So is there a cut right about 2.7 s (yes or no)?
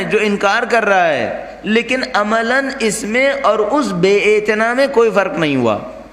no